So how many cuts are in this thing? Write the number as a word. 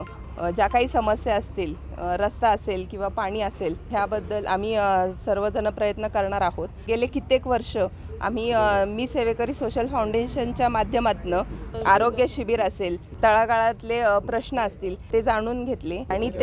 two